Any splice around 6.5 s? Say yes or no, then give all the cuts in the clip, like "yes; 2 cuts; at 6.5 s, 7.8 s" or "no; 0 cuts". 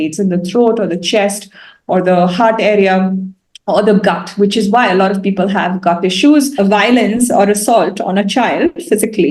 yes; 1 cut; at 6.5 s